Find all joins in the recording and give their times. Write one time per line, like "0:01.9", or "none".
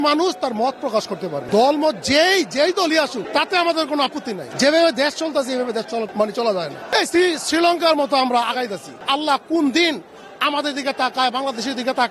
0:01.4
0:03.2
0:04.4
0:06.1
0:06.8
0:08.9